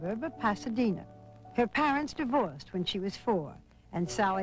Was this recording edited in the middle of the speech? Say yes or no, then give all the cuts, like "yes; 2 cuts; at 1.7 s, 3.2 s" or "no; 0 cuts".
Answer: no; 0 cuts